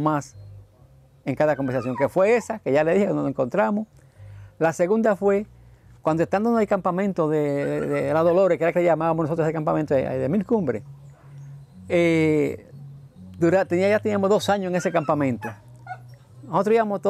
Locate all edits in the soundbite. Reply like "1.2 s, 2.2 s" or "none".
none